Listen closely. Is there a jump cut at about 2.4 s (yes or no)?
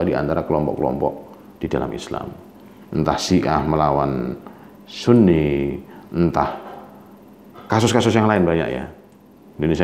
no